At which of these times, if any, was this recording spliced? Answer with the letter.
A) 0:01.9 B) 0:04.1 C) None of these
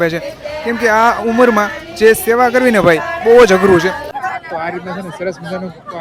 B